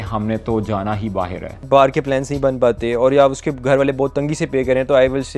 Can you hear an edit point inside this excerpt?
yes; 1 cut; at 1.6 s

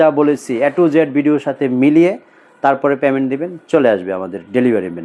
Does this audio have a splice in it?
no; 0 cuts

